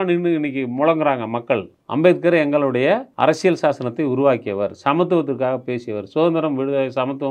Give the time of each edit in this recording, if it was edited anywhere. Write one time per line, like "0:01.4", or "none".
0:01.8
0:03.1